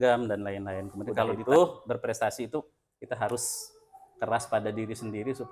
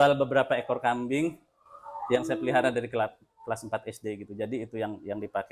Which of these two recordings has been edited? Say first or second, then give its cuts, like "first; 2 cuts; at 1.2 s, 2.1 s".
first; 1 cut; at 1.4 s